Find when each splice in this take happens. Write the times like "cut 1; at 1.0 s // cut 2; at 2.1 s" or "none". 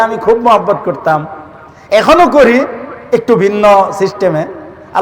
none